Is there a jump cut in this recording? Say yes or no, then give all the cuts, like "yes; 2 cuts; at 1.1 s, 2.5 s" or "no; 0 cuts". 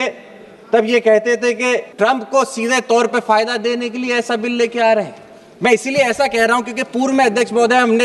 no; 0 cuts